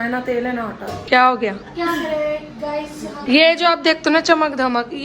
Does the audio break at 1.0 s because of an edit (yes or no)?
yes